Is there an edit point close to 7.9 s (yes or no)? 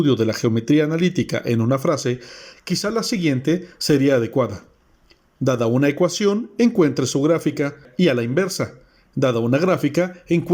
yes